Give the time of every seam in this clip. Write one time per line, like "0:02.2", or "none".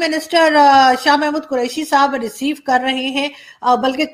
none